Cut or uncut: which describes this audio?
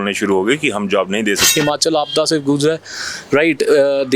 cut